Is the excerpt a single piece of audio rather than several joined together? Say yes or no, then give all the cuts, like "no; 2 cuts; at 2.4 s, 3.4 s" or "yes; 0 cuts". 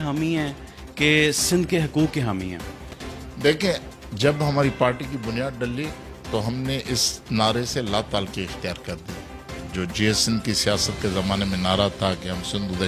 yes; 0 cuts